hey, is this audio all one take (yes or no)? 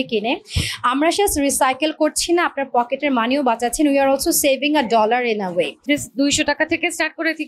no